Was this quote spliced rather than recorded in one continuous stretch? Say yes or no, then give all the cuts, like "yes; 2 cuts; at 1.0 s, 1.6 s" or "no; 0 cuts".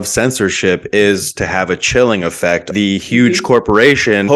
yes; 1 cut; at 2.7 s